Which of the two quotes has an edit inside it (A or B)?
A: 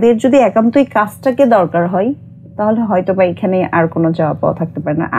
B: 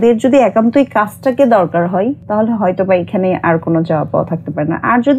B